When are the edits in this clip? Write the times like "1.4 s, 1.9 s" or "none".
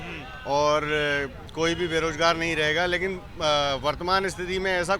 none